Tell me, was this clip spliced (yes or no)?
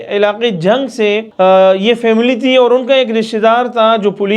yes